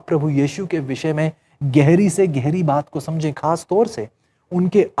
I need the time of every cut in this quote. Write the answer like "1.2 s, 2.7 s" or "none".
none